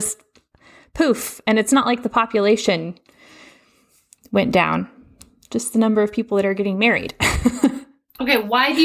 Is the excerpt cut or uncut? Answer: uncut